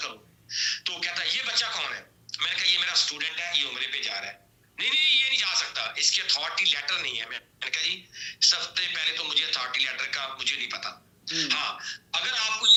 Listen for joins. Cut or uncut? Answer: uncut